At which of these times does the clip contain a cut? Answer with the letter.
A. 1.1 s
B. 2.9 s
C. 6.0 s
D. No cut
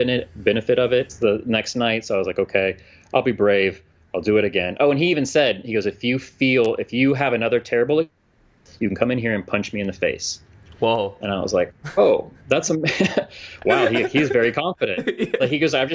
A